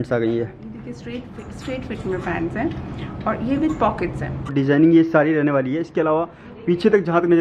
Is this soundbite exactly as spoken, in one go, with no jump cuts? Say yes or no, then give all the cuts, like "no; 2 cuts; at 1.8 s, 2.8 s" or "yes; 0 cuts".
no; 1 cut; at 4.5 s